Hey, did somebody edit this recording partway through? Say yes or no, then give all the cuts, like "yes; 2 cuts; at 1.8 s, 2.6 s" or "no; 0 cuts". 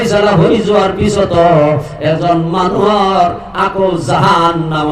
no; 0 cuts